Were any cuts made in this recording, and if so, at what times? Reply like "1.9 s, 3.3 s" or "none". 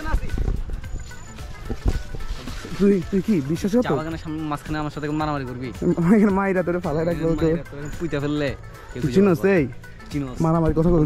none